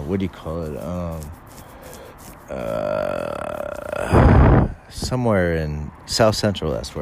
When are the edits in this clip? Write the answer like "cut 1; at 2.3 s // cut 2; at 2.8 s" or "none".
none